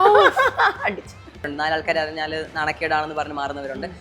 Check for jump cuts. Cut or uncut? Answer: cut